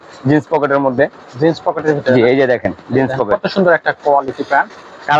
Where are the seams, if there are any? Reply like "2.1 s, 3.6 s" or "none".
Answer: none

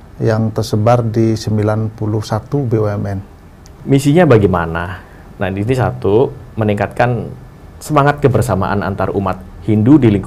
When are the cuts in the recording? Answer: 3.7 s

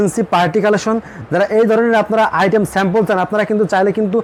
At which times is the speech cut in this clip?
none

